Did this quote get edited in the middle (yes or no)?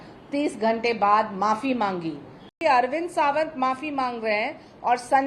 yes